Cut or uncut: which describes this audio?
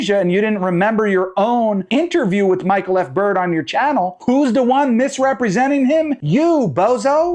uncut